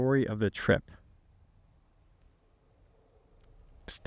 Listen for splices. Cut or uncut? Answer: uncut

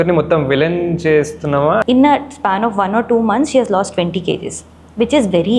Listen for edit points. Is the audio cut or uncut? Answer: cut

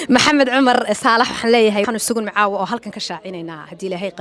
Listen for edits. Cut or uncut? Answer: cut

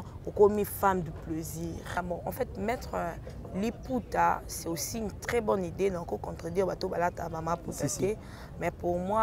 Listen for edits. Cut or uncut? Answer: cut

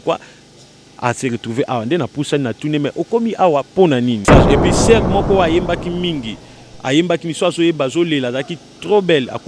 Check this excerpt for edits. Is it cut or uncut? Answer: cut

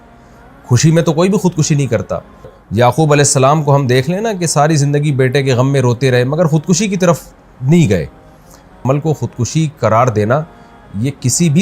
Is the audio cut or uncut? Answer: cut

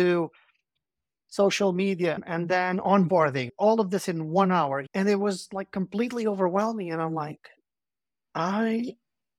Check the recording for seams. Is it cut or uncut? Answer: cut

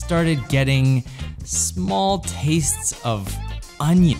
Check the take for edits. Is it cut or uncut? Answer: uncut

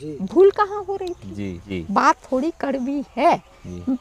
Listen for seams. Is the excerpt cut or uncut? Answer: cut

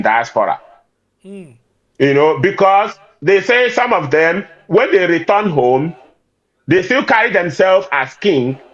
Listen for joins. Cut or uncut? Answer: uncut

